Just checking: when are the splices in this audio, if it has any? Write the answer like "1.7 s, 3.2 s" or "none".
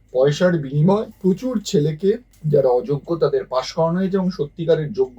1.1 s, 2.3 s

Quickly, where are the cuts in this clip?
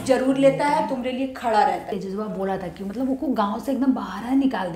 2.0 s

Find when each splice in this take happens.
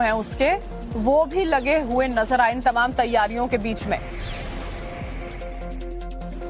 1.9 s

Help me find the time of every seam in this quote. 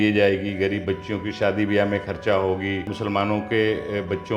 2.9 s

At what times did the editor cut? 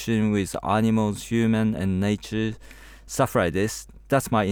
none

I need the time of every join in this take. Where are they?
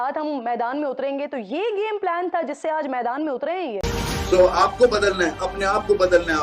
3.8 s

